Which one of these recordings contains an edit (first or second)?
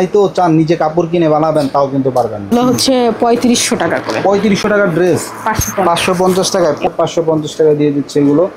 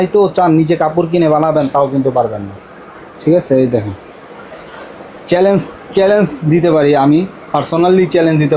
first